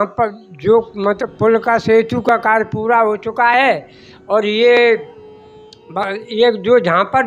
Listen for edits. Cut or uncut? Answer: uncut